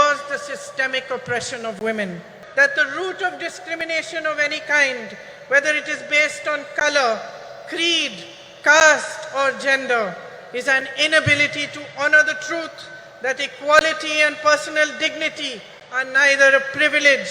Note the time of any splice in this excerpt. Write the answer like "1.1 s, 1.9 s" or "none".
2.3 s